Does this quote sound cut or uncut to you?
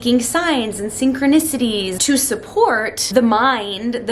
cut